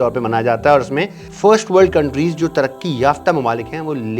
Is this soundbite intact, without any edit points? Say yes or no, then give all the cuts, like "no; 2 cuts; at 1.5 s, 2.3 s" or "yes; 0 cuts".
no; 1 cut; at 1.2 s